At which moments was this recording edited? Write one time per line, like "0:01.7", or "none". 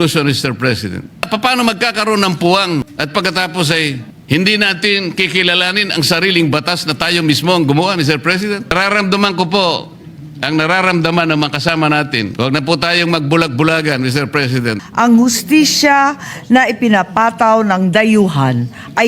0:01.2
0:03.0
0:04.1
0:08.7
0:12.3
0:14.8